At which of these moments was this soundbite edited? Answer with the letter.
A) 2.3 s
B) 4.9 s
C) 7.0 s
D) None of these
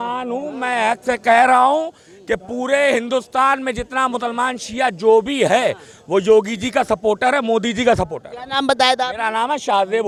D